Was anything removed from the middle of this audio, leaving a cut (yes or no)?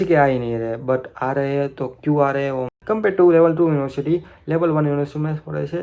yes